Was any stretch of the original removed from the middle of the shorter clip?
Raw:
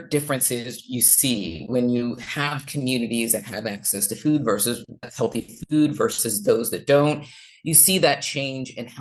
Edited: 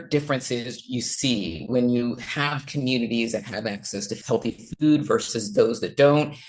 yes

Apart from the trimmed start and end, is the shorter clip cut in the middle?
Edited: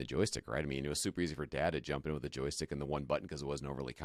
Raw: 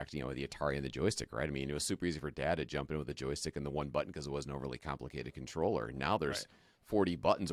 no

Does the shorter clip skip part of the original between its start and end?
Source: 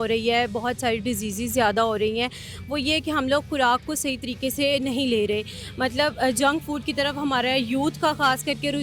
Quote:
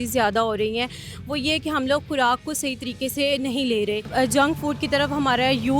yes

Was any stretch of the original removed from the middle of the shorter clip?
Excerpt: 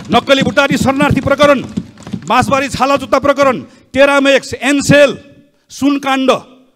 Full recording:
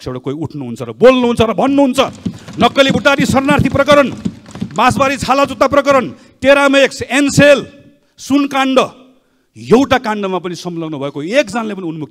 no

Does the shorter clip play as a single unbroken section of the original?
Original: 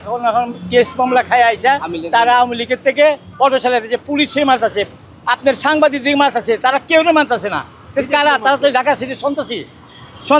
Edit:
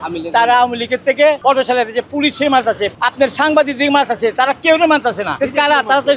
no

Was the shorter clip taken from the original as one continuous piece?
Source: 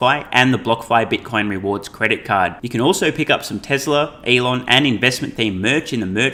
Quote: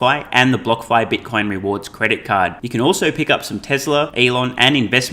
no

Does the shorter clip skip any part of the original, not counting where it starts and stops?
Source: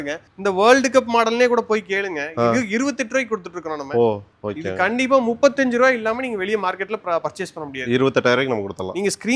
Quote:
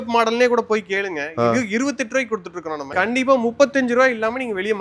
yes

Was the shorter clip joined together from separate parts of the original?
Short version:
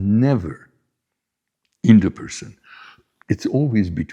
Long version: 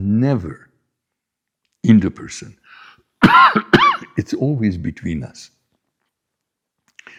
yes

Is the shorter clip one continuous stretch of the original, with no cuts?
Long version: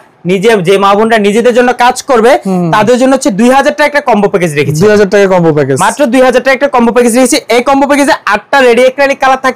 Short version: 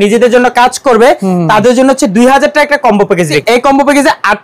no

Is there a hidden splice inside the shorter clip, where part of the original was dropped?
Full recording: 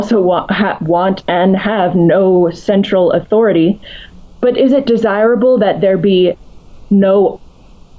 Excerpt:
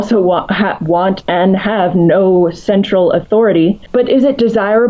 yes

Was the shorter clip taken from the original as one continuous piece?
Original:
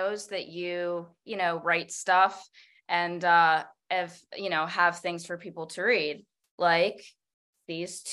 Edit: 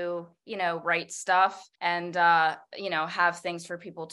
no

